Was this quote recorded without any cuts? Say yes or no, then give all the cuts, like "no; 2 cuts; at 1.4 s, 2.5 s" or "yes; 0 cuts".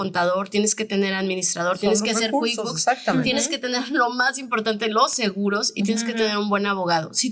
yes; 0 cuts